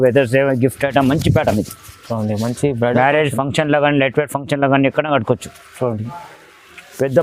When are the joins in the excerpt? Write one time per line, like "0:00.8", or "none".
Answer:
none

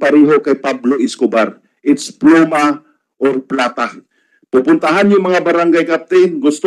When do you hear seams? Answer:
none

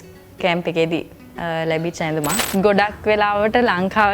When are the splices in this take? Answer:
0:02.4

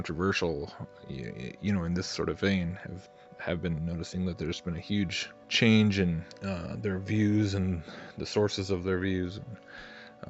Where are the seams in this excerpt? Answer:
none

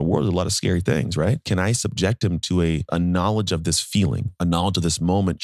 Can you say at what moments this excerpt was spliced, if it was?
0:01.4
0:02.9

